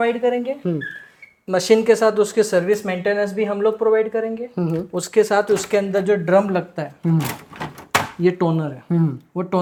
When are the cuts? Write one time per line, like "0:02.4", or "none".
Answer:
none

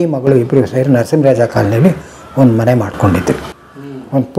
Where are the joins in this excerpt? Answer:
none

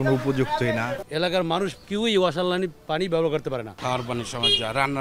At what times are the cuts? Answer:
0:01.0
0:03.7

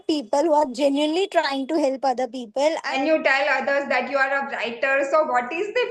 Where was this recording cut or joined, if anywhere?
0:02.9

